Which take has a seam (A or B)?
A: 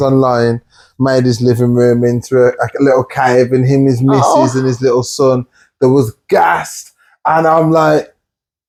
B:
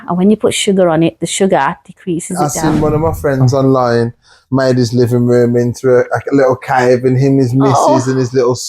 B